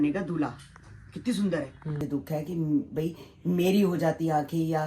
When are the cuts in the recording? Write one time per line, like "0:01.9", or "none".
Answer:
0:02.0